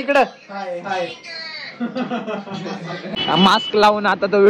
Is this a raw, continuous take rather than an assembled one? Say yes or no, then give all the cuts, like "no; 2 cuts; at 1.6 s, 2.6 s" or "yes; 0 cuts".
no; 1 cut; at 3.1 s